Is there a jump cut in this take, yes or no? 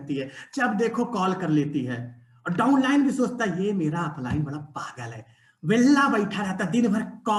no